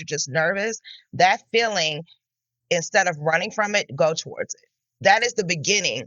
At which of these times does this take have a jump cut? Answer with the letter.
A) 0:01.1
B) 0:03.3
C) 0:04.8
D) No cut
C